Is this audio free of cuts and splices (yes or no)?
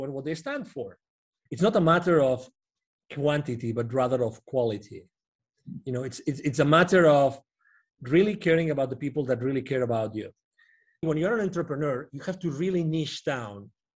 no